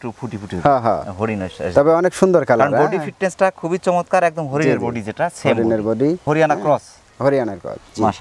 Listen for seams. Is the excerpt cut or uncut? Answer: uncut